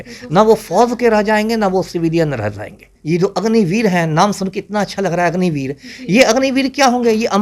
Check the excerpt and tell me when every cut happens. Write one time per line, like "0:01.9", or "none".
0:02.9